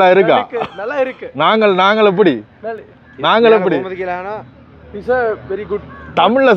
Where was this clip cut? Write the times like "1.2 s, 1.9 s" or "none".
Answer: none